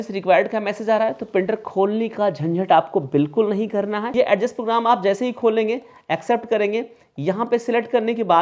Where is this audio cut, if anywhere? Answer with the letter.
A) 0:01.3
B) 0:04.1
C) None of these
B